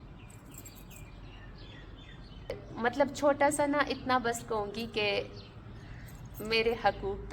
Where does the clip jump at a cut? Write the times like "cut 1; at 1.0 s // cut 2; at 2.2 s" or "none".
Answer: cut 1; at 2.6 s